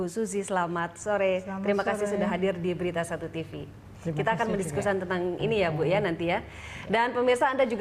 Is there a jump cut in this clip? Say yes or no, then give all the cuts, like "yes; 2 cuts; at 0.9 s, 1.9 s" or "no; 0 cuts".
no; 0 cuts